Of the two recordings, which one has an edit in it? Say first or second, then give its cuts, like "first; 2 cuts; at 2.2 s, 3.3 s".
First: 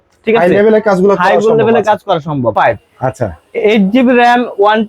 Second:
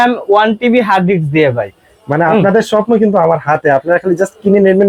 first; 1 cut; at 2.5 s